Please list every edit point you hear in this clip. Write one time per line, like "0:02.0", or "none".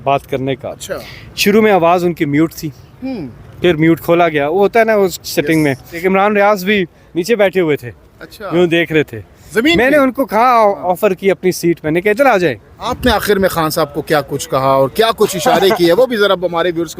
0:06.0
0:12.9